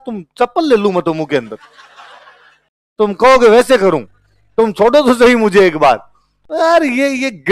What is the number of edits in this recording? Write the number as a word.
zero